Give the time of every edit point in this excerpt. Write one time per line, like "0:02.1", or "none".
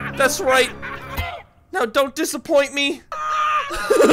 0:03.1